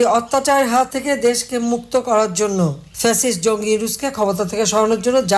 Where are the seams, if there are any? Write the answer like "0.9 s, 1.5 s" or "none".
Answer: 0.9 s, 2.9 s